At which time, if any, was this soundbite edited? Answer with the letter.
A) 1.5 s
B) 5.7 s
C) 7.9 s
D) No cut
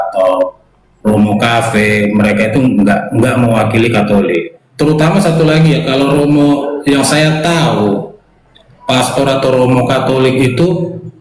D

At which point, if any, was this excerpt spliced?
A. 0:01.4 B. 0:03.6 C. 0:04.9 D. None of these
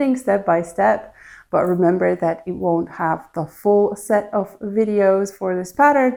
D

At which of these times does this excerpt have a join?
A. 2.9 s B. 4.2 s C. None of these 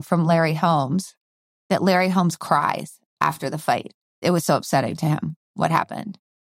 B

